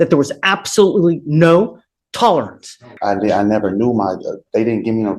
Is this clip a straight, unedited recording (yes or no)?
no